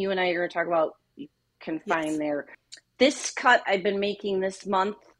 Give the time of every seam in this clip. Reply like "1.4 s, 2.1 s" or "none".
2.6 s